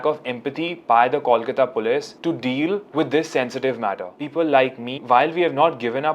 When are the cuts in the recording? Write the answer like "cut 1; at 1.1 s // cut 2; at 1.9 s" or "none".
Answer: cut 1; at 4.1 s